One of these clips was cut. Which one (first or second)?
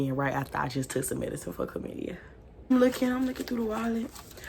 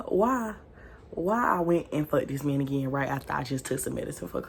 first